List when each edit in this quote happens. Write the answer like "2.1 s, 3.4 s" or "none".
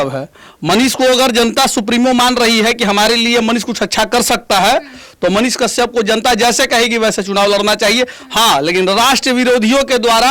none